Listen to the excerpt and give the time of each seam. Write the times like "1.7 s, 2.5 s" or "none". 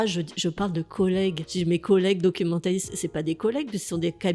1.4 s